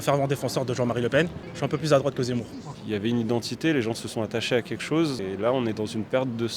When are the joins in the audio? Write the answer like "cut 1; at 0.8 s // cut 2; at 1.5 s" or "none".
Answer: cut 1; at 1.4 s // cut 2; at 2.6 s // cut 3; at 5.2 s